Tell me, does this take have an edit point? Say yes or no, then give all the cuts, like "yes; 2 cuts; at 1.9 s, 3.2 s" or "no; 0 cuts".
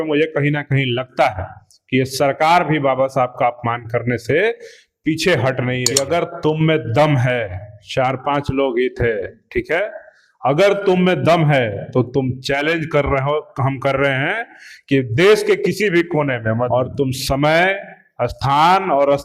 yes; 2 cuts; at 5.9 s, 16.7 s